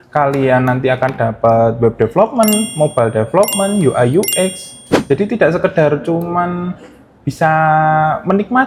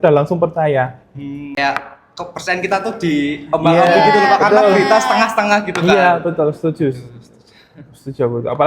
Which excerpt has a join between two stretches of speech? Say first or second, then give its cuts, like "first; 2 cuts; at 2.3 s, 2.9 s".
second; 1 cut; at 1.6 s